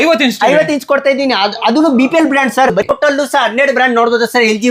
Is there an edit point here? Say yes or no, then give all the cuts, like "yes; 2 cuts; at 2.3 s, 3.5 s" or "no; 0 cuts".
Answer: yes; 1 cut; at 2.9 s